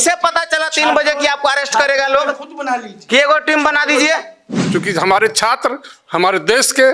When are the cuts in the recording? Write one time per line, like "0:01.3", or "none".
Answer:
0:04.5